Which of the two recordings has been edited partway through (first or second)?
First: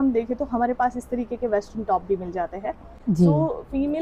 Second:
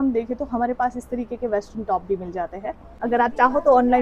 second